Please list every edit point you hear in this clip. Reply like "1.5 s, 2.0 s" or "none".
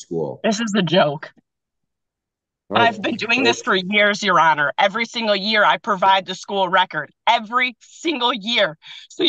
none